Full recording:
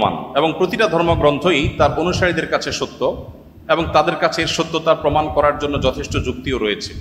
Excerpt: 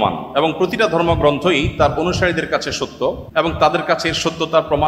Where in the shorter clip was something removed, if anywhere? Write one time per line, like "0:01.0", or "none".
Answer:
0:03.2